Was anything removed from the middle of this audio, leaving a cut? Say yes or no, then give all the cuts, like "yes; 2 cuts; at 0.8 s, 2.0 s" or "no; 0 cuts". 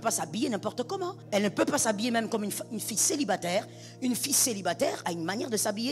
yes; 1 cut; at 1.2 s